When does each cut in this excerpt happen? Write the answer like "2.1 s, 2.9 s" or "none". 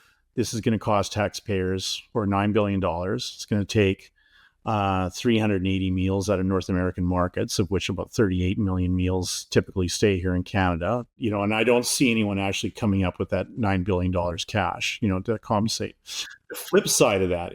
11.2 s